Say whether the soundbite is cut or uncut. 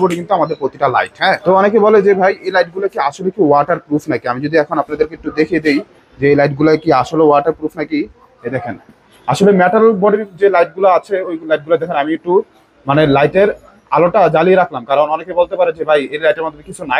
uncut